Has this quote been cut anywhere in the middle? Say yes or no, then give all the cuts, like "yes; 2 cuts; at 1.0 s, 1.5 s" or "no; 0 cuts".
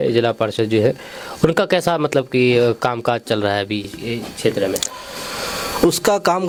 no; 0 cuts